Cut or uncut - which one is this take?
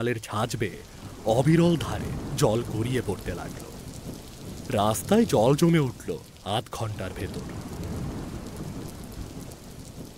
cut